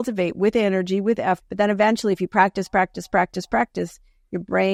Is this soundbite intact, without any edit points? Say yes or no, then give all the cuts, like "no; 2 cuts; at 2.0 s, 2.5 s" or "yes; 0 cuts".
yes; 0 cuts